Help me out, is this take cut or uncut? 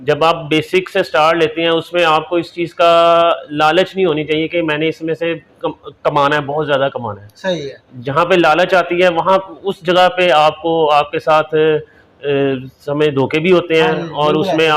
uncut